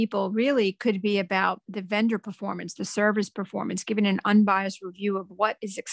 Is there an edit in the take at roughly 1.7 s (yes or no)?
yes